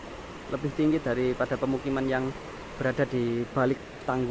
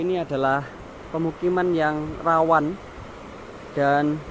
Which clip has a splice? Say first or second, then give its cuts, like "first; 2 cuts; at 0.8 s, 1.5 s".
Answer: second; 1 cut; at 1.0 s